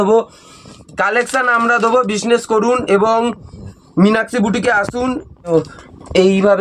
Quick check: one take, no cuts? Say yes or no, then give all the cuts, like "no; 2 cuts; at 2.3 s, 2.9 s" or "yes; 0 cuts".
no; 1 cut; at 5.5 s